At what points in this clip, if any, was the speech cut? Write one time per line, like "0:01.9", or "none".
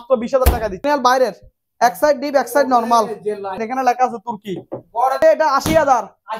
0:00.9
0:03.7
0:05.2